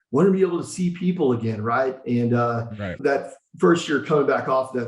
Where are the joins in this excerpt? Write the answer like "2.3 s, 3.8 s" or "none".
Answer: 3.0 s